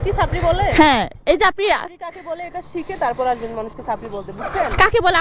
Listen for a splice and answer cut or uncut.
uncut